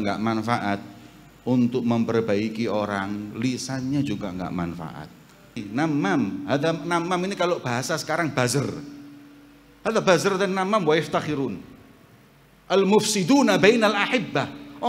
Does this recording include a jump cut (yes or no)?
yes